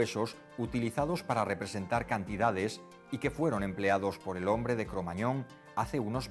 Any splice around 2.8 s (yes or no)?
no